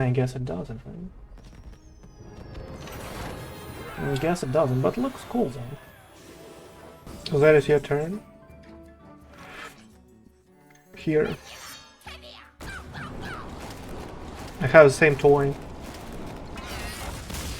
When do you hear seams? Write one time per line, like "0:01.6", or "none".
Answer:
0:07.1